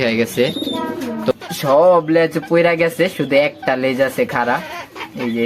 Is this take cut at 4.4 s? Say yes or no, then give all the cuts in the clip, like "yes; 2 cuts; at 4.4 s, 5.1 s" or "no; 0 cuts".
no; 1 cut; at 1.3 s